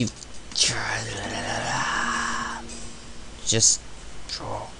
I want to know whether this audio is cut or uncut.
cut